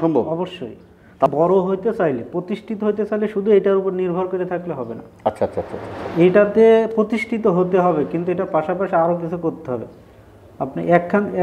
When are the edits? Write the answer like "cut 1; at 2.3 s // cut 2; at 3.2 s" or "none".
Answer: cut 1; at 1.3 s